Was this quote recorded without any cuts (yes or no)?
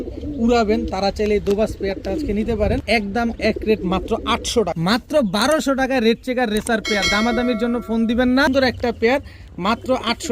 no